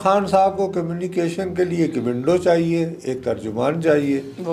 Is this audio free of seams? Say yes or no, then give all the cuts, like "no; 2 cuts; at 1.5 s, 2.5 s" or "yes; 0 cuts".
yes; 0 cuts